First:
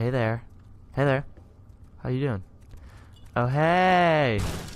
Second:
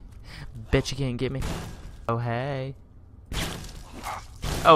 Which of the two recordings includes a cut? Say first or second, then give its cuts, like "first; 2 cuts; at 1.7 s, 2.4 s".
second; 1 cut; at 2.1 s